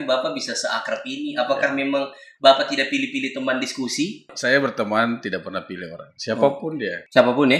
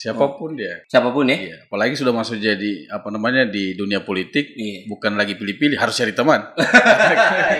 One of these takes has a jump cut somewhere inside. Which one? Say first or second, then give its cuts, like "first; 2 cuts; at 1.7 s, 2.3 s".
first; 1 cut; at 4.3 s